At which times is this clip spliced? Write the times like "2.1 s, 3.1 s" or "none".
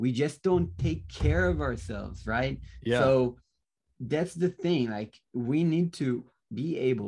none